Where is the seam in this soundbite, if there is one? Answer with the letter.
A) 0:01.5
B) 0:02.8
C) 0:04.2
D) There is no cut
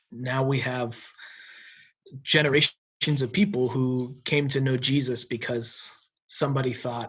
B